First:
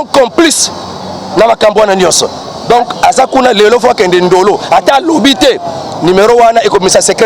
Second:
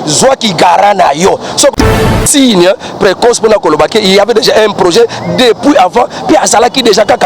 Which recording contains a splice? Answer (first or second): second